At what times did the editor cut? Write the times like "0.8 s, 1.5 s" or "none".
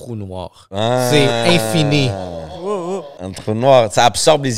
3.1 s